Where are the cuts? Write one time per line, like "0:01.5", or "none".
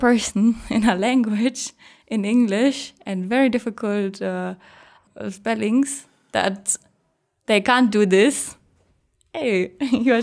0:05.0